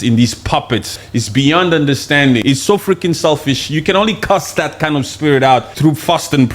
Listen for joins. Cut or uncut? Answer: cut